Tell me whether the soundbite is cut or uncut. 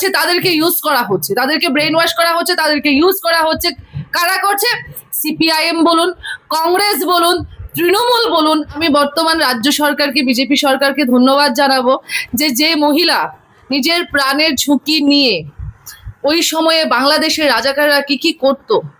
cut